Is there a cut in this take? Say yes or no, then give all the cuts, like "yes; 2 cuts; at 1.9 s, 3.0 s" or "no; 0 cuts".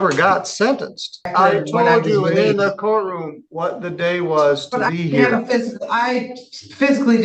yes; 1 cut; at 1.3 s